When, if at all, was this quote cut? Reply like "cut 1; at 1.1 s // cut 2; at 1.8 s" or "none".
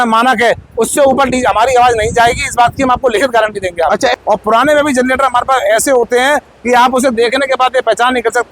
cut 1; at 4.1 s